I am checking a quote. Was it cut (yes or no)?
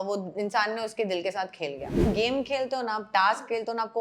yes